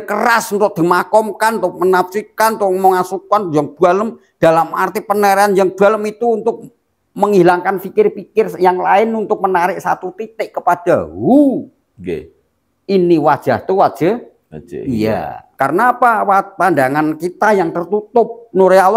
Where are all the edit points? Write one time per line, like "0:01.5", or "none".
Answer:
0:15.4